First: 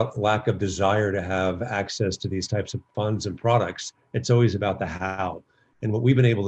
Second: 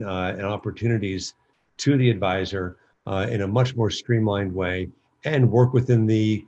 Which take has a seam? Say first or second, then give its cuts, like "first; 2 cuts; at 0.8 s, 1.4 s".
first; 1 cut; at 2.8 s